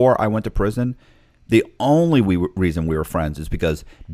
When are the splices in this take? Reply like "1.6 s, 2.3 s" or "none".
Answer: none